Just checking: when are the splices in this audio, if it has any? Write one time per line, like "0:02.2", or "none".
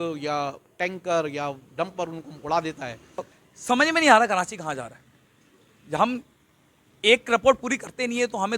0:03.3